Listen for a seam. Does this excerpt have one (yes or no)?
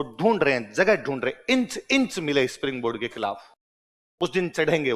no